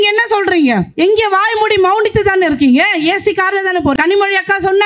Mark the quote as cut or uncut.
cut